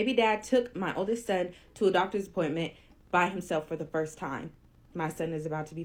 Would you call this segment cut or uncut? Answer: uncut